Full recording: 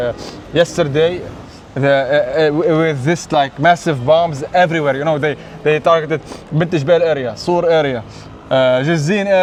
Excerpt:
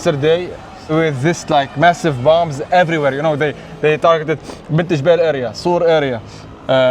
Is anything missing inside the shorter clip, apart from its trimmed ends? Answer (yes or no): yes